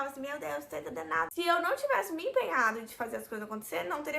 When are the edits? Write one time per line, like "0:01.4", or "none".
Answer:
0:01.3

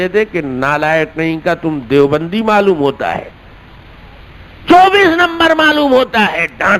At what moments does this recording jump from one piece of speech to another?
none

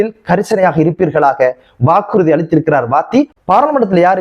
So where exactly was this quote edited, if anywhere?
0:03.3

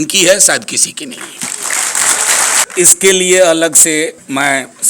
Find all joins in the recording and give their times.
0:02.7

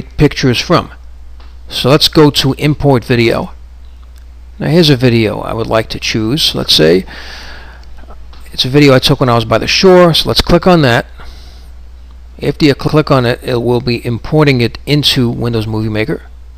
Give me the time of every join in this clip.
0:11.1

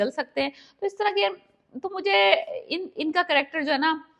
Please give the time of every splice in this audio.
none

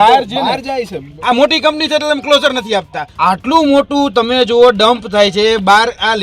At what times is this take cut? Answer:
0:01.0
0:03.0

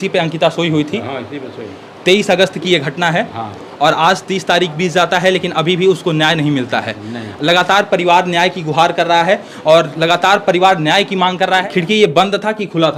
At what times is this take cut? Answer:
none

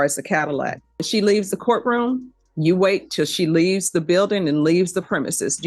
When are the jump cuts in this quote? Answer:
0:01.1

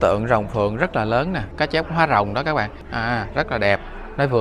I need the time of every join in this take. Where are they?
0:01.5
0:02.8

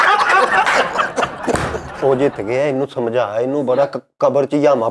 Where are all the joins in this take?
0:02.0

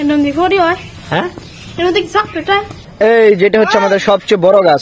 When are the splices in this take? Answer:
0:02.8

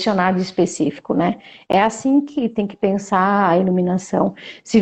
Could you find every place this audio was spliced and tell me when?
none

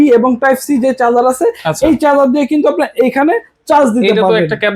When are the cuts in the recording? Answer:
none

